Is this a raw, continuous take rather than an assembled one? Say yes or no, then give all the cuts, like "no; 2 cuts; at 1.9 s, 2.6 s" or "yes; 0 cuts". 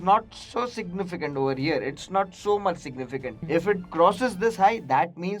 no; 1 cut; at 3.4 s